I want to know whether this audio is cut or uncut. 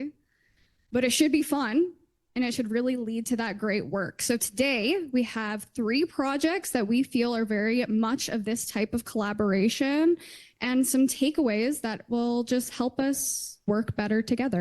cut